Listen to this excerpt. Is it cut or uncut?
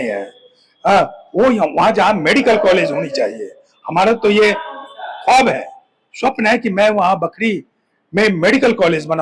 uncut